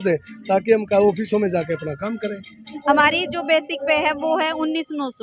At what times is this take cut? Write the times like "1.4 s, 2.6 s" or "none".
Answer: 2.6 s